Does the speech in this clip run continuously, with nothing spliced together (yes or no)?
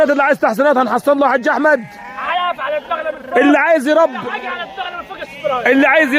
yes